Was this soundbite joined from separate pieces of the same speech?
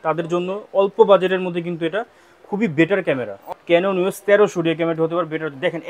yes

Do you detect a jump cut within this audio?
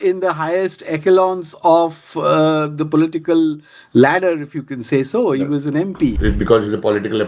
yes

